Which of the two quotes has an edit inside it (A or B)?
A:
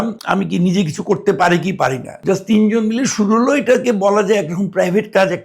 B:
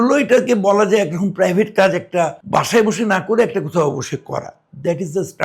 A